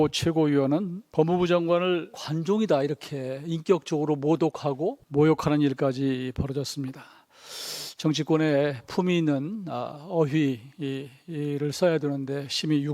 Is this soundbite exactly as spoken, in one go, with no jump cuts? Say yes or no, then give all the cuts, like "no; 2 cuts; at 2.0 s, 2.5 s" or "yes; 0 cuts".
no; 3 cuts; at 1.0 s, 2.2 s, 5.0 s